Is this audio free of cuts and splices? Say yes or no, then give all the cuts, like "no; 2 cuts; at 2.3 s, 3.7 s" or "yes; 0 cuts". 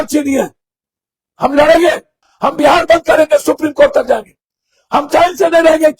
yes; 0 cuts